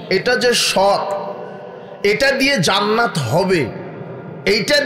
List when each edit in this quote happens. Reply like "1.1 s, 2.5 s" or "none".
none